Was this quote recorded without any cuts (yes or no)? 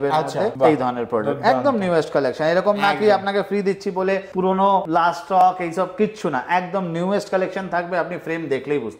yes